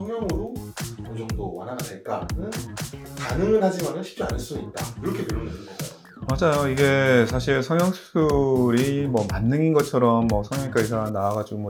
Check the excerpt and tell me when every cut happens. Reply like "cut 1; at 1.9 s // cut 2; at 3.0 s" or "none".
none